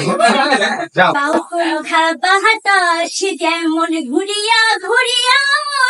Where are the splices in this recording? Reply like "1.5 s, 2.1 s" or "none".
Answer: 1.1 s